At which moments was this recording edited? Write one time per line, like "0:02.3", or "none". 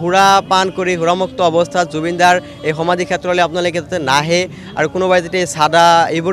none